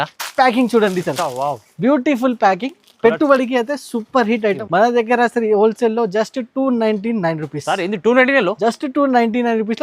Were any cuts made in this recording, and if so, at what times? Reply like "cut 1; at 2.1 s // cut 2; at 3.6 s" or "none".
cut 1; at 4.6 s